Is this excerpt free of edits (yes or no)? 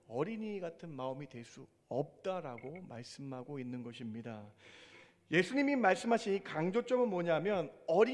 yes